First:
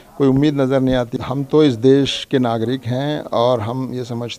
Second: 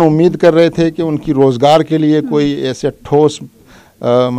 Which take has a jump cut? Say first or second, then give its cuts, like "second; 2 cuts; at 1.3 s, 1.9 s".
first; 1 cut; at 1.2 s